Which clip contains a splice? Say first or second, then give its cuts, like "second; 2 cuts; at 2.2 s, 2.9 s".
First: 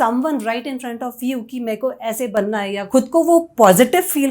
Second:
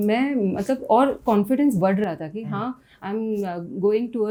first; 1 cut; at 2.8 s